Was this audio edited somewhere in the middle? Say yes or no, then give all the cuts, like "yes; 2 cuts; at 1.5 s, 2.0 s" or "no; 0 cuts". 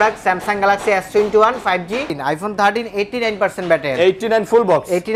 yes; 1 cut; at 2.2 s